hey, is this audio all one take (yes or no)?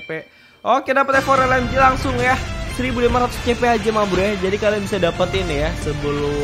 yes